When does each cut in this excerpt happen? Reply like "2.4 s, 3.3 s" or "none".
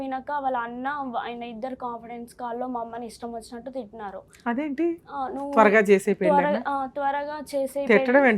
none